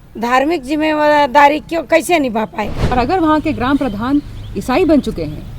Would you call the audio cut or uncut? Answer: cut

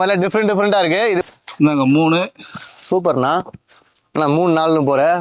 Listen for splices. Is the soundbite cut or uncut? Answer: cut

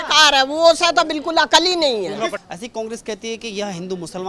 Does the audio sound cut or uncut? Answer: cut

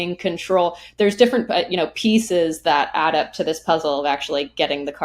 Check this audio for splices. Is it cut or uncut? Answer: uncut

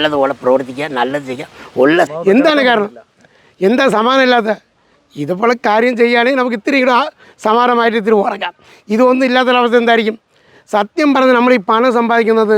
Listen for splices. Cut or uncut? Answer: cut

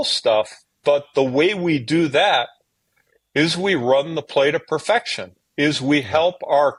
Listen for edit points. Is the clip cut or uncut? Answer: uncut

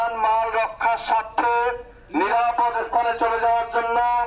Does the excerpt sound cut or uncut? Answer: uncut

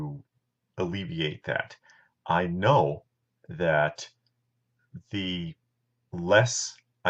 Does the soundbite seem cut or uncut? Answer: uncut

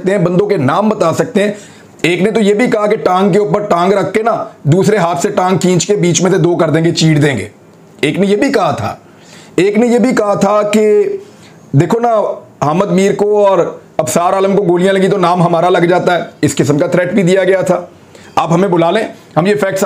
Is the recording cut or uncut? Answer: cut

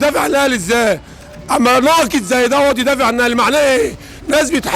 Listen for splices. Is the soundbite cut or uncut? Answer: uncut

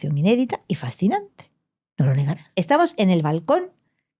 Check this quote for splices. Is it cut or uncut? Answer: cut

